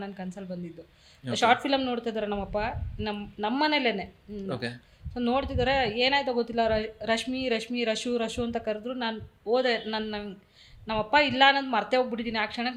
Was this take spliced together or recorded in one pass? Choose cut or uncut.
uncut